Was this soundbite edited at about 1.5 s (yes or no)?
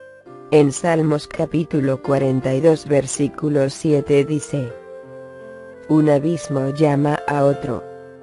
no